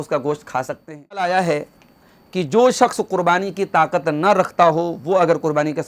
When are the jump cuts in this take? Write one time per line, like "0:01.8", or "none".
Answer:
0:01.3